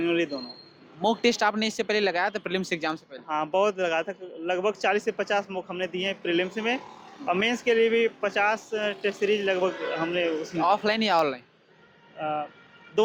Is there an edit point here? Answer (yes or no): no